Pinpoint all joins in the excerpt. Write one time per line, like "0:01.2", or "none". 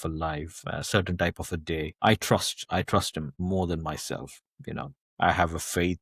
0:03.3
0:05.0